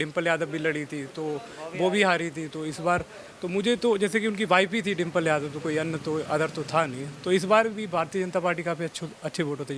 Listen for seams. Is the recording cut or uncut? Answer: uncut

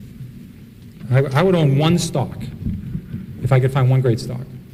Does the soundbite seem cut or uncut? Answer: uncut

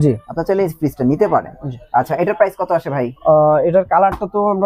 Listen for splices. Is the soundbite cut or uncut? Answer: uncut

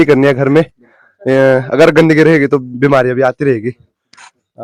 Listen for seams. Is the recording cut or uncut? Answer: uncut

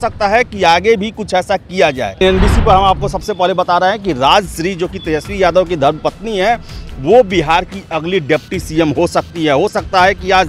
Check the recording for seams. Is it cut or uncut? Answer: cut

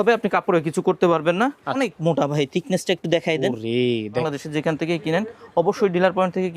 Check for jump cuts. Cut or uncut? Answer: cut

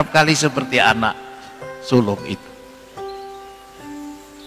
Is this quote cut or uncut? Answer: uncut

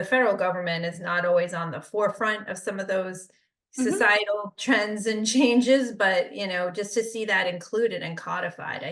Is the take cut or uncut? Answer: uncut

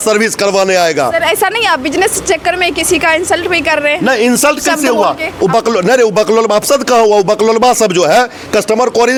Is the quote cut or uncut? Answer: uncut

